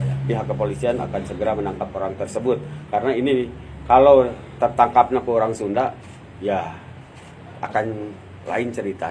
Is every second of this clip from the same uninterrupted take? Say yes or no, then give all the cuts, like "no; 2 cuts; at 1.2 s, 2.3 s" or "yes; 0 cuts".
yes; 0 cuts